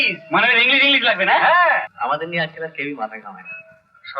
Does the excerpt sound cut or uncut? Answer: cut